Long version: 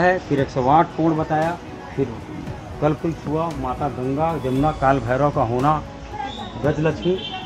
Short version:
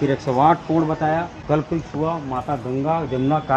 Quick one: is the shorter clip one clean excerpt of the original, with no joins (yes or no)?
no